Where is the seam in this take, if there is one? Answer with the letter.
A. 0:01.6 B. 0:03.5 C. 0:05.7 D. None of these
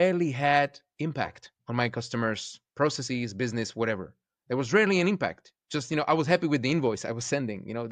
A